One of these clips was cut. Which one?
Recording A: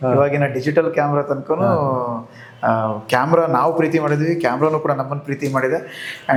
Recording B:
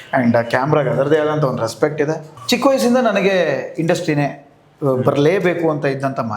B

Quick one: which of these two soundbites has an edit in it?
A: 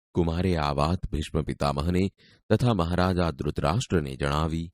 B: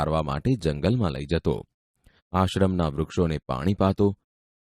A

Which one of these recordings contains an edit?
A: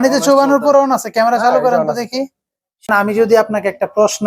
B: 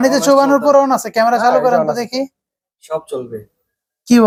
A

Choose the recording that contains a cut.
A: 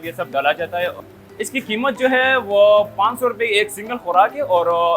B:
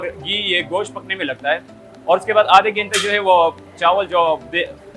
A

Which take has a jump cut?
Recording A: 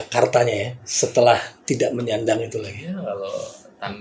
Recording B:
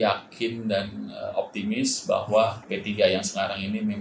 B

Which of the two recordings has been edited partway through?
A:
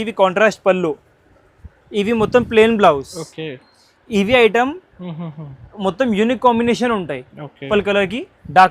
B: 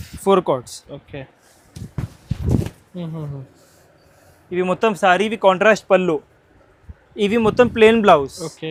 A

